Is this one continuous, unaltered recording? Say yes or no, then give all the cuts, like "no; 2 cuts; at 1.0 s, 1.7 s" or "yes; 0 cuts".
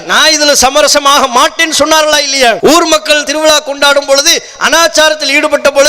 no; 1 cut; at 2.6 s